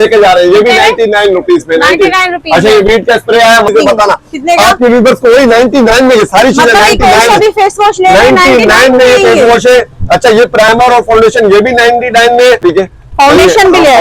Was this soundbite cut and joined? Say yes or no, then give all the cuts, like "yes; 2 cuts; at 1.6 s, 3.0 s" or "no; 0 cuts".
yes; 2 cuts; at 3.7 s, 12.6 s